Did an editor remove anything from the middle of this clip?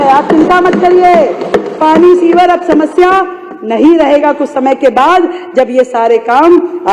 no; 0 cuts

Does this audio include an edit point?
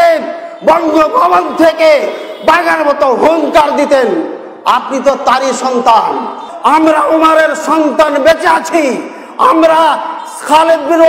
yes; 1 cut; at 6.4 s

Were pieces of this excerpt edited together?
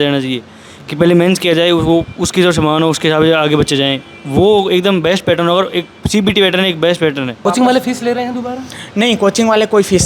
yes; 1 cut; at 7.4 s

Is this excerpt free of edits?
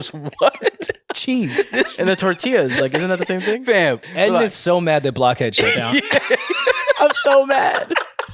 no; 1 cut; at 4.1 s

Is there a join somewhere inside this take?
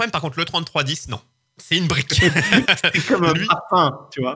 no; 0 cuts

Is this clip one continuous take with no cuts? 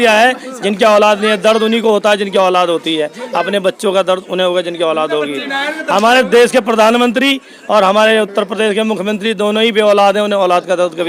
yes; 0 cuts

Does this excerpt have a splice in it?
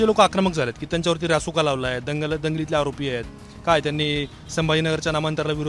no; 0 cuts

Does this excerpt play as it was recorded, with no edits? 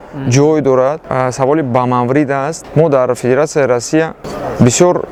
yes; 0 cuts

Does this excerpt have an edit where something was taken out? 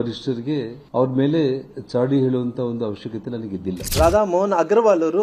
no; 0 cuts

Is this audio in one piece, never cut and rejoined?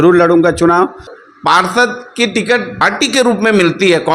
no; 2 cuts; at 1.2 s, 2.8 s

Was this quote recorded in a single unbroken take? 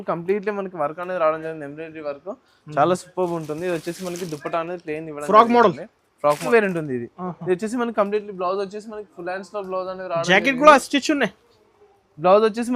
no; 1 cut; at 6.4 s

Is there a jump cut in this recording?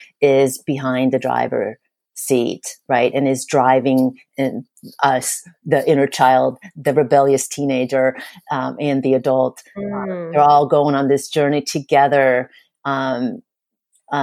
no; 0 cuts

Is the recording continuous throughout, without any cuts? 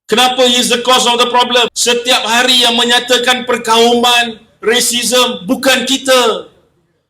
no; 1 cut; at 1.8 s

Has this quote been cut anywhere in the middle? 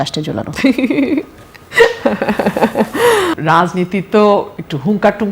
yes; 1 cut; at 3.3 s

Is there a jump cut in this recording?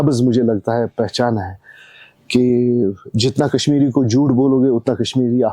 no; 0 cuts

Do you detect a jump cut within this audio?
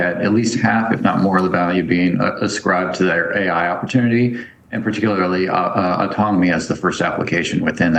no; 0 cuts

